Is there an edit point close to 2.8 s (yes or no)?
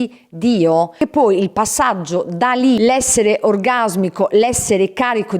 yes